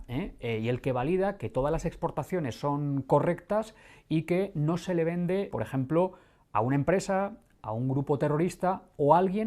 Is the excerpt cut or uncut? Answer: uncut